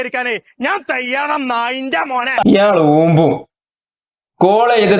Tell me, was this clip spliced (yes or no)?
yes